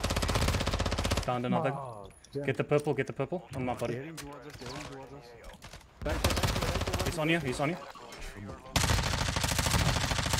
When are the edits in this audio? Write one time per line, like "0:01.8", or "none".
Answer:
0:07.1